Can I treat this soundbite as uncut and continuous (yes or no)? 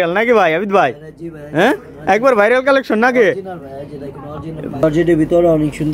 no